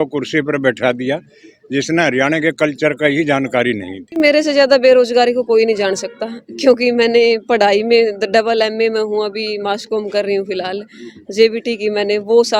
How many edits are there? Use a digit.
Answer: 1